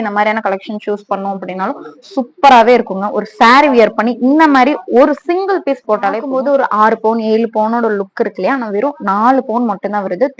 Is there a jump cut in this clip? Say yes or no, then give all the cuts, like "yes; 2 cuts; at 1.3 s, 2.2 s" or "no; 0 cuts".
yes; 1 cut; at 6.2 s